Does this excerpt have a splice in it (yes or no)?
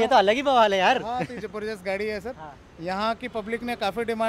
no